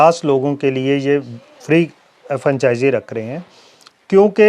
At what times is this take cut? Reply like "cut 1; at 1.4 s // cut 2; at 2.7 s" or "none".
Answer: none